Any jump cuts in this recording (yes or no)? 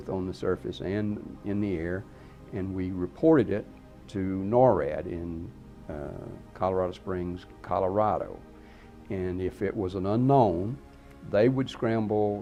no